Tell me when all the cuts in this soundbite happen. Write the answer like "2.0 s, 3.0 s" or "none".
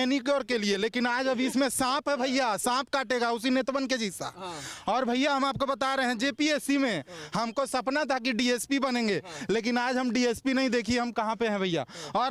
none